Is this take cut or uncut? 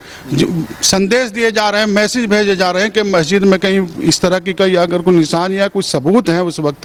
uncut